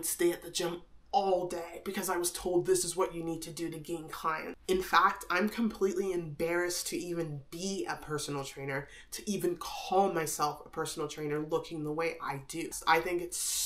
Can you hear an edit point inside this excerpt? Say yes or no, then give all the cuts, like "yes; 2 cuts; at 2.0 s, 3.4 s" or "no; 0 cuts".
yes; 2 cuts; at 4.5 s, 12.8 s